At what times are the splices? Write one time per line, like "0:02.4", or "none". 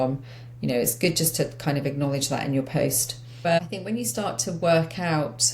0:03.5